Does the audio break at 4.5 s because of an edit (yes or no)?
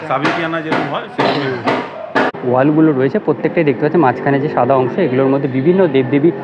no